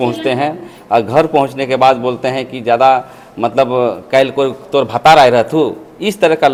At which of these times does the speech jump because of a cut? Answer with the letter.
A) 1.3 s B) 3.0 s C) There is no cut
C